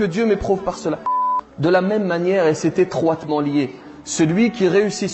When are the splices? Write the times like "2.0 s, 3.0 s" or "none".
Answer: 1.3 s